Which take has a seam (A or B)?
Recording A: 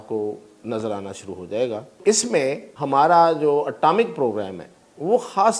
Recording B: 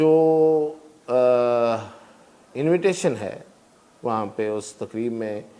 A